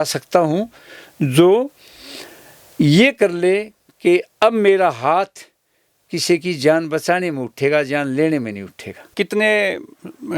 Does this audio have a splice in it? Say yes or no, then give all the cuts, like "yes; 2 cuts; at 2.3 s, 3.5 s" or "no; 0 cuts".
yes; 1 cut; at 9.1 s